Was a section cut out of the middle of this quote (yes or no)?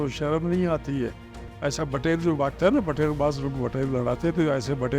yes